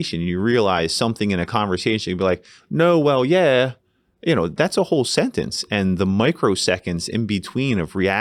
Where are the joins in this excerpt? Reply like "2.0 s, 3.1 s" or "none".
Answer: none